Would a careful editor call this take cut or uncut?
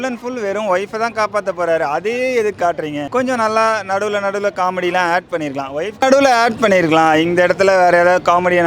cut